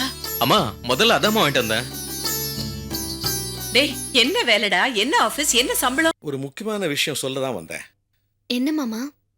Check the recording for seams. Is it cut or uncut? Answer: cut